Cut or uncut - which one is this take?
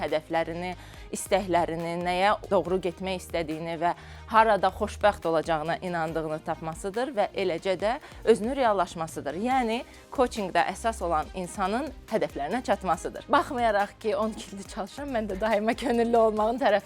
cut